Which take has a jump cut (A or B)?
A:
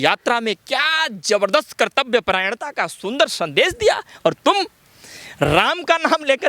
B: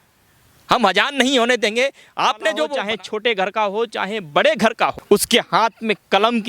B